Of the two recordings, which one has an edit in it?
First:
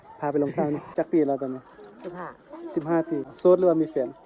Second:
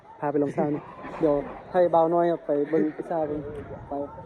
first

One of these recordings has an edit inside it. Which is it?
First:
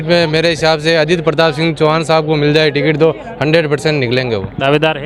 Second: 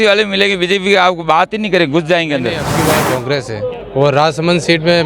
second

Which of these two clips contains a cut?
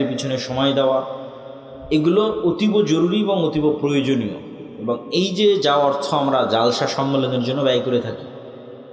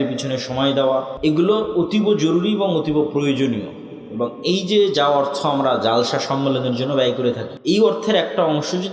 second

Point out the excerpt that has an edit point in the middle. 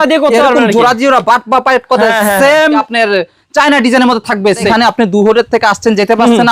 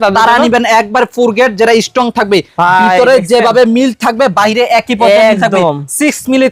first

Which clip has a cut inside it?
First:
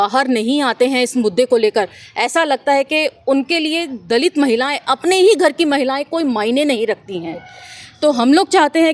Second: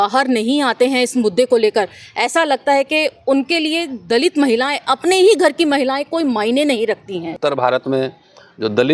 second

